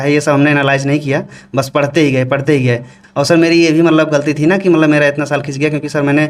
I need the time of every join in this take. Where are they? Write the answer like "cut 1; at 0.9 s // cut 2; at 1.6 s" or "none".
cut 1; at 2.9 s